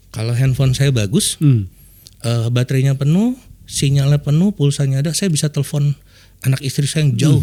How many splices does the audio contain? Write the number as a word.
zero